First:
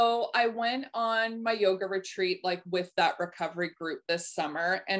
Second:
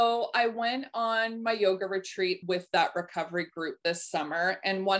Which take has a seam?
second; 1 cut; at 2.4 s

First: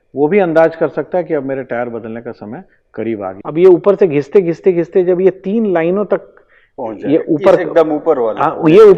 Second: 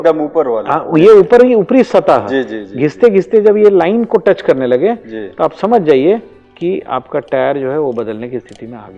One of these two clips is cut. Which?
first; 1 cut; at 3.4 s

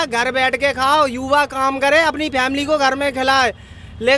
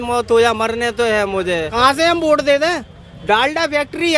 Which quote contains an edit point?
second; 1 cut; at 1.7 s

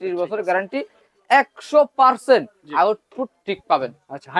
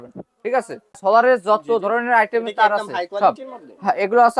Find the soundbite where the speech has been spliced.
second; 1 cut; at 1.0 s

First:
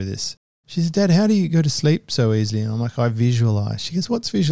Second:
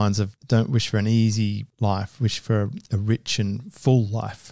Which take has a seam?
first; 1 cut; at 1.5 s

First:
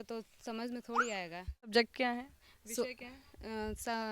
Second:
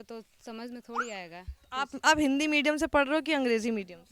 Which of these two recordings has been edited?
first; 1 cut; at 1.7 s

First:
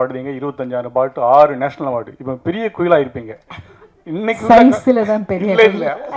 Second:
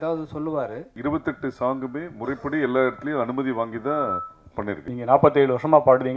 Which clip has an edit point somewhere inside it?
second; 2 cuts; at 1.0 s, 4.9 s

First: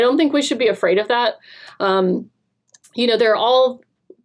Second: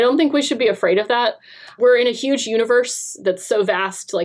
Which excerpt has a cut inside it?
second; 1 cut; at 1.7 s

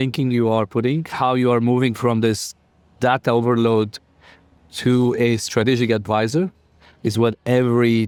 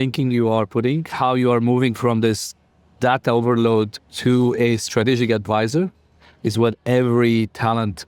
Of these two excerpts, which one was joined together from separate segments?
second; 1 cut; at 4.0 s

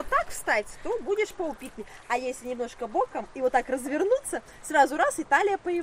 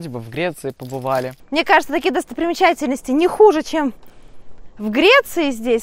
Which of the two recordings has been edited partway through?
second; 1 cut; at 1.4 s

